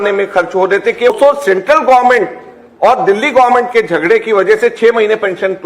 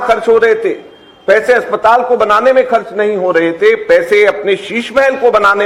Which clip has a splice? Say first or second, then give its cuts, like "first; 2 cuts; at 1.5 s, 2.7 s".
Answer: first; 1 cut; at 1.1 s